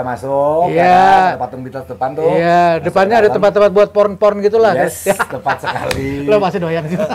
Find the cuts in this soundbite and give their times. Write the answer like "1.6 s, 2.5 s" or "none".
none